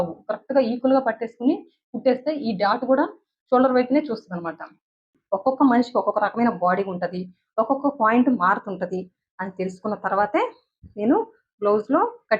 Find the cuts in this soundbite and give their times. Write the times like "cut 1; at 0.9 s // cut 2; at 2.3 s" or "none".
cut 1; at 5.1 s